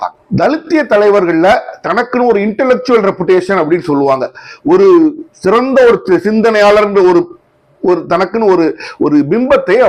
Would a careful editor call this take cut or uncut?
uncut